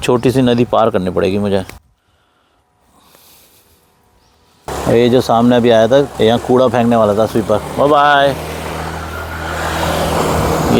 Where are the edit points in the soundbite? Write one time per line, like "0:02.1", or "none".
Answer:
none